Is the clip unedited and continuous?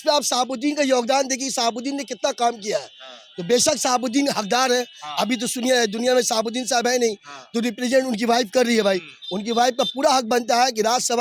yes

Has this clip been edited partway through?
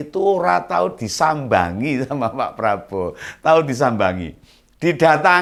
no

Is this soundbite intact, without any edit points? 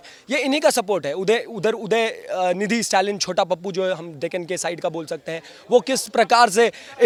yes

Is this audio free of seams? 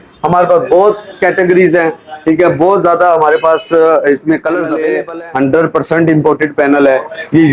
no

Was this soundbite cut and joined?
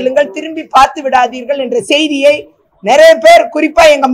no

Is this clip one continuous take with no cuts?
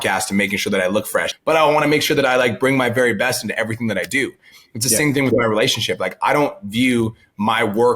no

